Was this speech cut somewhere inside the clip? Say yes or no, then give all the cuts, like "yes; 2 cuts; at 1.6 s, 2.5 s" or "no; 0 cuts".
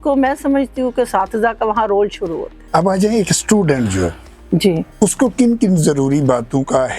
yes; 1 cut; at 2.5 s